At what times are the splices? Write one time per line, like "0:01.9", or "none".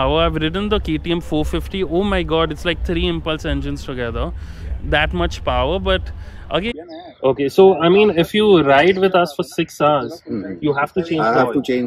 0:06.7